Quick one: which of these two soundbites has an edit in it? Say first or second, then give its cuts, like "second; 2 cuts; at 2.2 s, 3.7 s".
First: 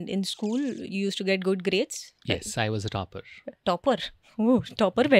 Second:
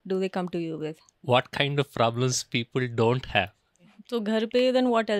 second; 2 cuts; at 1.1 s, 3.9 s